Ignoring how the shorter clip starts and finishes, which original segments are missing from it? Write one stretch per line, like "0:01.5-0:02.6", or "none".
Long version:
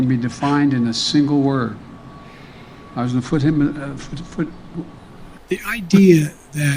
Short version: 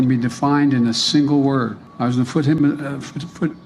0:01.8-0:02.8